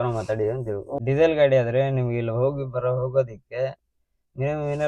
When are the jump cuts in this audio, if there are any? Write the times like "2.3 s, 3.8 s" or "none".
0.9 s